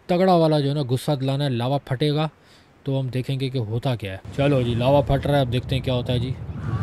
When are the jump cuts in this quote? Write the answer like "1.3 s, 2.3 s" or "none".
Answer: 4.2 s

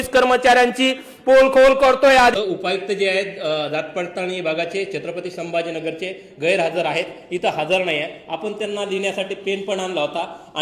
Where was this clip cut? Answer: 2.4 s

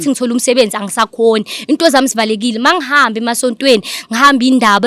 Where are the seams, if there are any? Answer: none

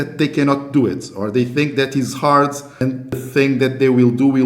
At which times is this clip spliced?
3.1 s

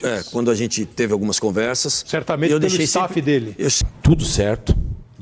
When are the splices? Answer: 3.9 s

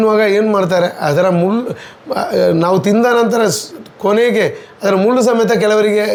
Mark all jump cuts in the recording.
none

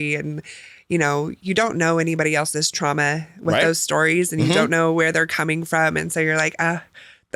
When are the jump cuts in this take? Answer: none

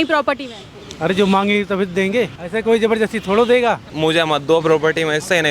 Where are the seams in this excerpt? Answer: 2.4 s, 3.9 s

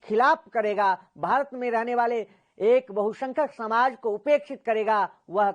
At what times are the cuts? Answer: none

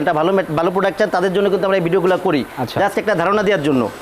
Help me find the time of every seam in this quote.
none

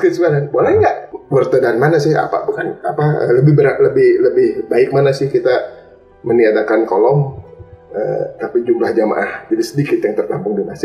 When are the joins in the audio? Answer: 1.1 s

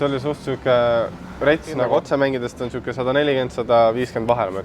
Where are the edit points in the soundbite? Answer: 1.9 s

